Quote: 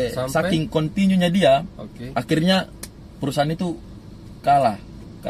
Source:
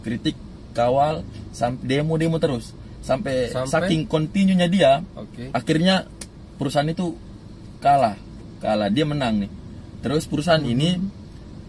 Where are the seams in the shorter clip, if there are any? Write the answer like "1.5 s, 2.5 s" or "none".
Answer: none